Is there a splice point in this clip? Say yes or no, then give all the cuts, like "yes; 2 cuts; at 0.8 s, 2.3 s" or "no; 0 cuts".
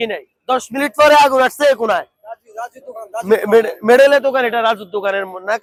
no; 0 cuts